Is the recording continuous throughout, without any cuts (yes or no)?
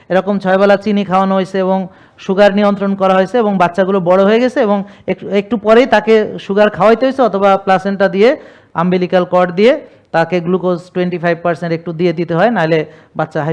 yes